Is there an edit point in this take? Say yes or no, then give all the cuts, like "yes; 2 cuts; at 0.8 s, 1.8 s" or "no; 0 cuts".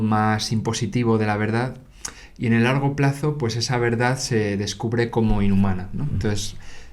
no; 0 cuts